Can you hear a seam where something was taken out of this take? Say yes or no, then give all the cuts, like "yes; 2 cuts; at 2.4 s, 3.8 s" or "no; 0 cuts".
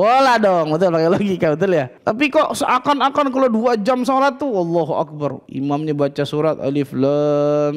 yes; 2 cuts; at 1.9 s, 5.5 s